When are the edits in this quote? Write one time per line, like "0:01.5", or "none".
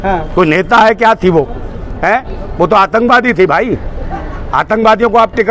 none